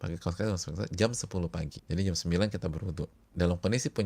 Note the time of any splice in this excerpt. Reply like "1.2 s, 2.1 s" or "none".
1.8 s, 3.2 s